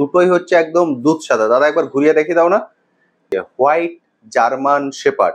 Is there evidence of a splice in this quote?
yes; 1 cut; at 3.2 s

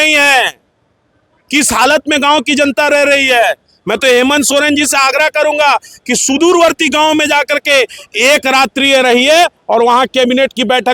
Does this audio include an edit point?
no; 0 cuts

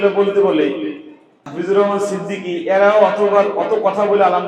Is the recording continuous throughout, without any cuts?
no; 1 cut; at 1.4 s

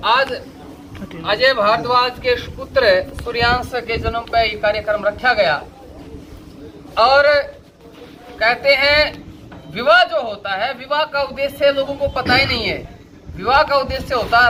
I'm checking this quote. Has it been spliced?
no; 0 cuts

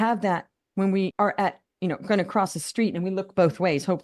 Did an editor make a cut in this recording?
yes; 1 cut; at 1.1 s

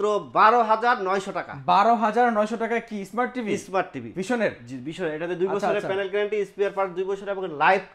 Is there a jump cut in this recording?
no; 0 cuts

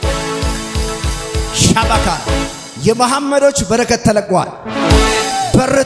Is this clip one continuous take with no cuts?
yes; 0 cuts

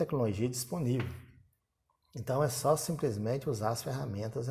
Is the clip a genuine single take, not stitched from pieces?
yes; 0 cuts

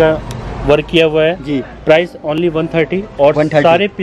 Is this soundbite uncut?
yes; 0 cuts

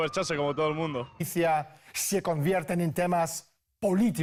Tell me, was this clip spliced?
no; 0 cuts

